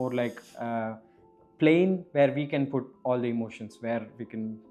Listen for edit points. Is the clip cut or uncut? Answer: uncut